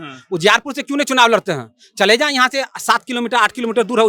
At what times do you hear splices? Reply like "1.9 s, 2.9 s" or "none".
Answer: none